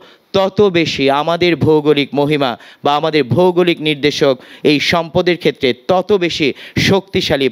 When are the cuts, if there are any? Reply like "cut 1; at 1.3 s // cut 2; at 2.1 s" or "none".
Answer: none